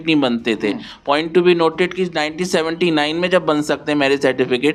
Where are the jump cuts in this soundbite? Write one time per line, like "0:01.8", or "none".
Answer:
none